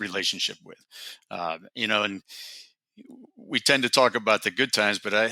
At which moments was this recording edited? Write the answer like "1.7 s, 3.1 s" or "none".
none